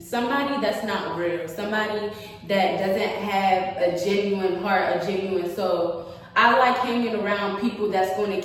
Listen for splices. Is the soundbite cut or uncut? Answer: uncut